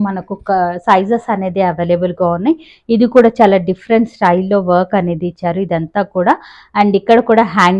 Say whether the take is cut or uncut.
uncut